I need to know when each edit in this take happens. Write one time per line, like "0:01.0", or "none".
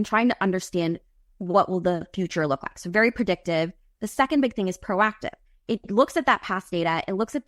none